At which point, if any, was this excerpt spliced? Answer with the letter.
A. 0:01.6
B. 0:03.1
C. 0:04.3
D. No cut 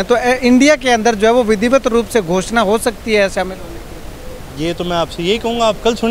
D